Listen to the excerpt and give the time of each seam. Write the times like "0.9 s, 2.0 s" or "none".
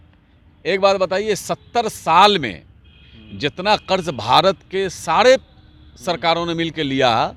none